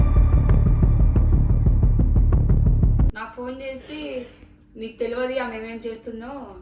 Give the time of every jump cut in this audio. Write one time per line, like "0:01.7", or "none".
0:03.1